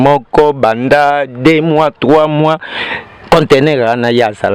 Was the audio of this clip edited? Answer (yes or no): no